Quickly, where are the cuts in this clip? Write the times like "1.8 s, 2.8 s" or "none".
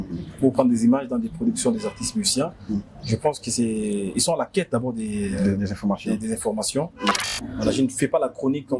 7.2 s

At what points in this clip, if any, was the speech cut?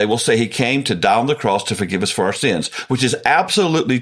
none

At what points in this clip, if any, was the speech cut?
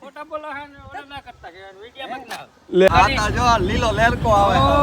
2.9 s

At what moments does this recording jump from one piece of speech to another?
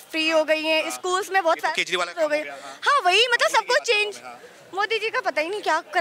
none

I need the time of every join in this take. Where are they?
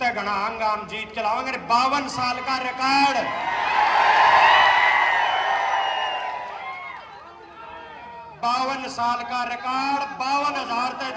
none

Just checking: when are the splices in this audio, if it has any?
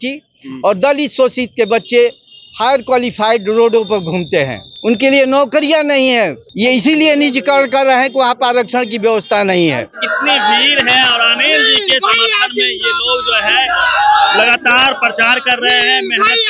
4.6 s, 6.4 s, 10.0 s

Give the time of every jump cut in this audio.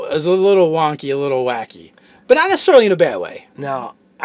2.5 s

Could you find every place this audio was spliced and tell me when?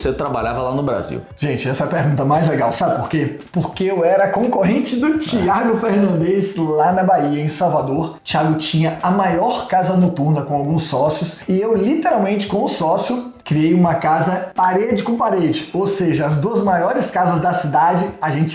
none

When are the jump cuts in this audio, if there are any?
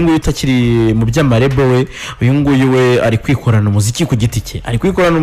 none

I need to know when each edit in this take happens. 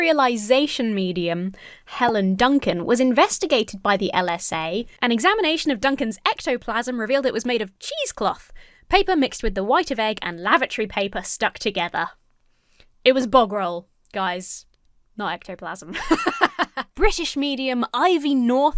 4.9 s, 16.8 s

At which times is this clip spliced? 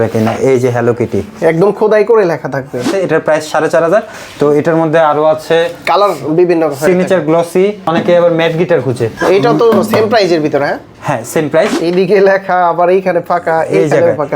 2.9 s, 11.8 s

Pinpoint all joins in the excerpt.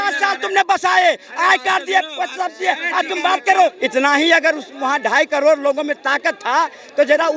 3.8 s

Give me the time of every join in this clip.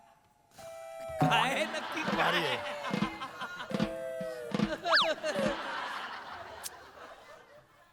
none

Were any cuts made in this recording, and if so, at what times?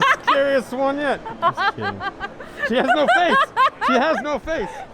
none

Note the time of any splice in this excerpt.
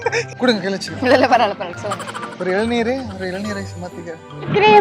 1.7 s

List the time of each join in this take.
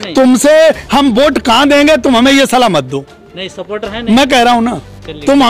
none

